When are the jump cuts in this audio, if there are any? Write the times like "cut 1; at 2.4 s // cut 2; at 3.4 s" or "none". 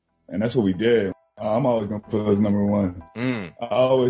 cut 1; at 1.1 s // cut 2; at 3.1 s